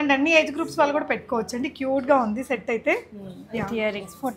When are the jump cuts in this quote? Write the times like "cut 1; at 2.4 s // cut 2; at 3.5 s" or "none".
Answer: none